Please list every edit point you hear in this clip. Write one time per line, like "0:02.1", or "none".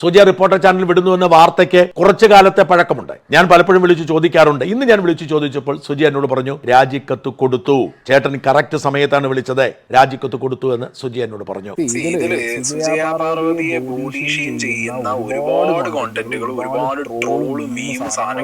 0:11.7